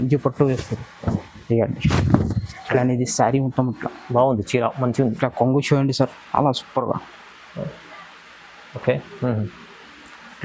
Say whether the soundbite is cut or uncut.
uncut